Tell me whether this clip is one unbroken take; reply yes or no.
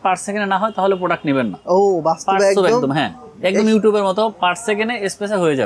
yes